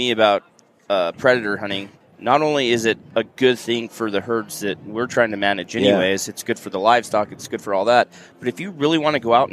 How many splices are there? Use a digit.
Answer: 1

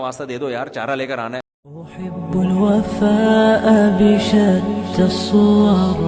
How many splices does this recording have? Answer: 1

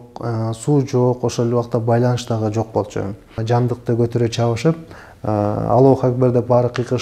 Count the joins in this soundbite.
1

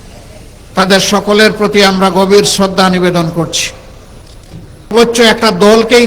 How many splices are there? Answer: 1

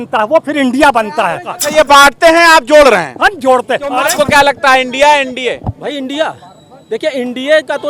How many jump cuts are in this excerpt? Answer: 2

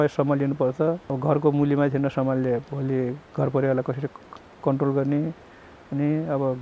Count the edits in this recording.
1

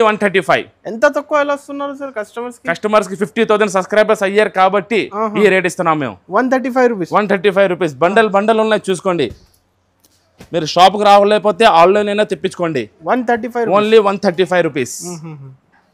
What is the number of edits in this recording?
0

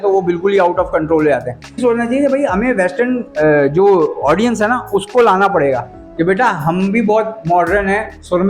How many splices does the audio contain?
1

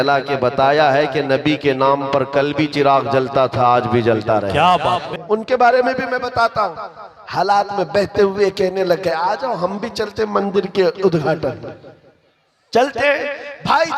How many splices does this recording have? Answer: 1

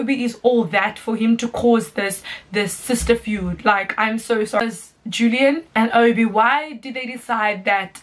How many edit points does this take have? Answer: 1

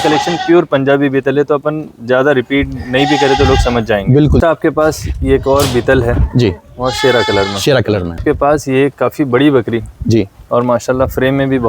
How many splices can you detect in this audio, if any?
2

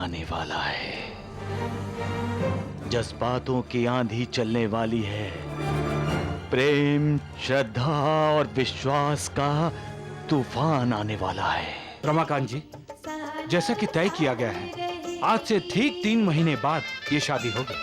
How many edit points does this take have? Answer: 1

